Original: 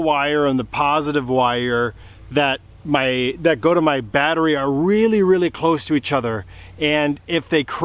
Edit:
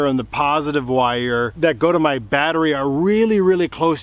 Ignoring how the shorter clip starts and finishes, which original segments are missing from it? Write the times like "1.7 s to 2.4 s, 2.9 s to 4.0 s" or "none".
1.9 s to 3.4 s

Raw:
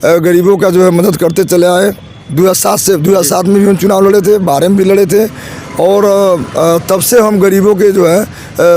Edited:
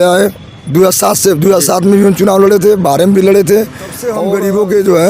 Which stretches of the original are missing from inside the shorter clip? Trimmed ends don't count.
5.7 s to 7.1 s

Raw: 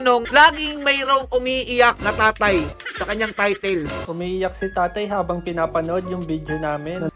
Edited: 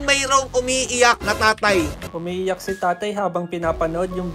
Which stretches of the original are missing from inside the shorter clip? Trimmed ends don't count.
2.8 s to 4.0 s

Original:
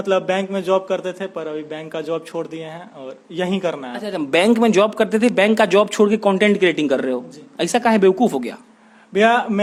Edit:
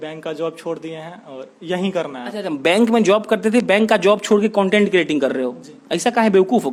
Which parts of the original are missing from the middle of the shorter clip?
none

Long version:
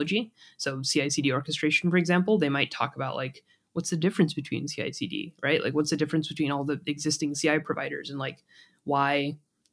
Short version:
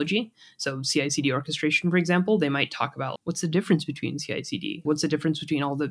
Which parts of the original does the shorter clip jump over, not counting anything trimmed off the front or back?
3.1 s to 3.6 s, 5.3 s to 5.7 s

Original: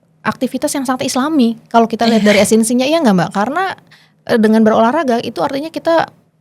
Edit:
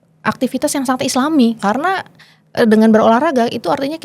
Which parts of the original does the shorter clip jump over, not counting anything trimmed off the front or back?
1.6 s to 3.3 s

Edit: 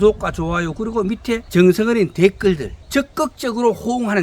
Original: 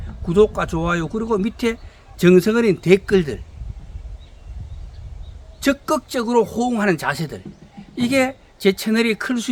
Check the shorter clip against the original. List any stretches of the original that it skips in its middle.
1.8 s to 2.1 s, 3.4 s to 5.5 s

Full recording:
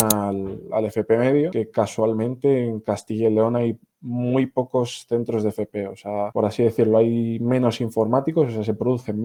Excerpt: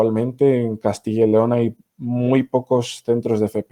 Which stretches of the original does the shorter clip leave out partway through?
none

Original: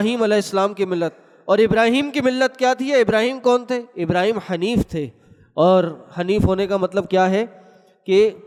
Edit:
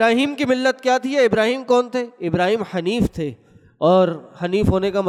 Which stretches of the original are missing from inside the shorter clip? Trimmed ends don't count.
none

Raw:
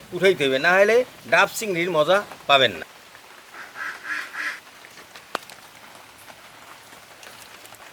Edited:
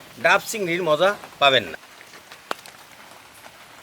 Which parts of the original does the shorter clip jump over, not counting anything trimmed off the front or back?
3.0 s to 4.7 s

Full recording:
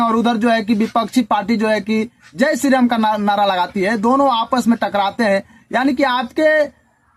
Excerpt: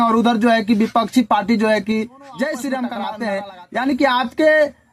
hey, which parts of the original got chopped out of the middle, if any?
3.1 s to 5.1 s

